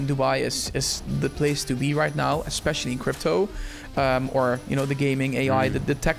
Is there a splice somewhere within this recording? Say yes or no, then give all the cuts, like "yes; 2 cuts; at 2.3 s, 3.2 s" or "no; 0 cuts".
no; 0 cuts